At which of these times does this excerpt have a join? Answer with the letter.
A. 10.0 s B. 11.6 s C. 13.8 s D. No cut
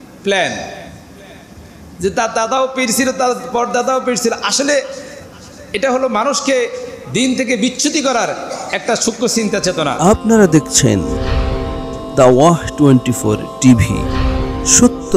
A